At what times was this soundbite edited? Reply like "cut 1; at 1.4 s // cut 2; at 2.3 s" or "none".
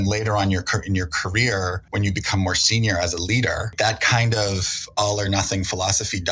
cut 1; at 1.8 s // cut 2; at 3.7 s